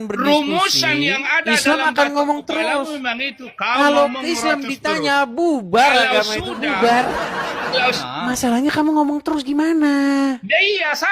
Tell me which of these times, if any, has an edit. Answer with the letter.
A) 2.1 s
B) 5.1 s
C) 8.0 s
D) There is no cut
C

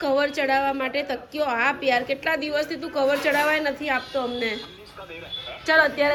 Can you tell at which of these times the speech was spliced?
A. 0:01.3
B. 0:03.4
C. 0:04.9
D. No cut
D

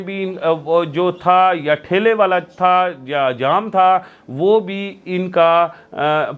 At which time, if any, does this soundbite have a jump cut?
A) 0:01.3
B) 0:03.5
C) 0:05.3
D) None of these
D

